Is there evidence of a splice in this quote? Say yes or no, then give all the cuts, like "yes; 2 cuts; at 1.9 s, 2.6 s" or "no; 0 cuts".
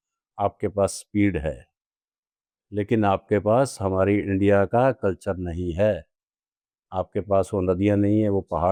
no; 0 cuts